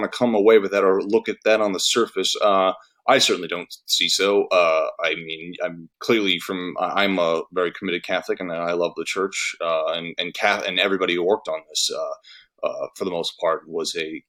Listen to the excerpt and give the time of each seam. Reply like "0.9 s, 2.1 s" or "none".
none